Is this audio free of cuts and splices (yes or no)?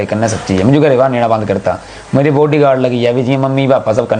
yes